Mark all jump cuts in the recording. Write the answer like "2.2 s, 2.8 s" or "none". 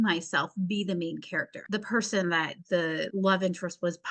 1.5 s, 2.9 s

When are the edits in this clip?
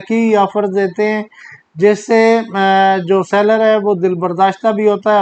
none

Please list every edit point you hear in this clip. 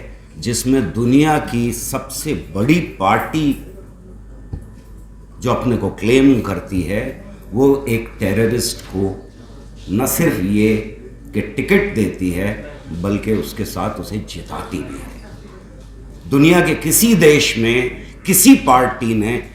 none

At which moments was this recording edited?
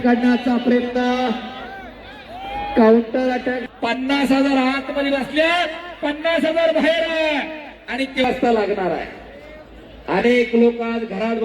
3.6 s, 8.2 s

